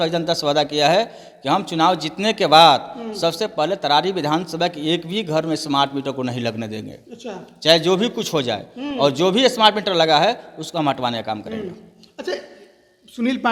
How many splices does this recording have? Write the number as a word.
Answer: zero